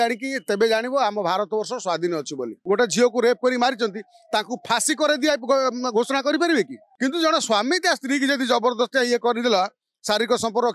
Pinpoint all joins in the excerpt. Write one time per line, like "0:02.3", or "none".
0:02.5
0:06.8